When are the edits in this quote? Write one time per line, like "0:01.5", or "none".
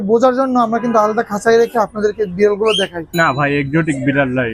0:03.1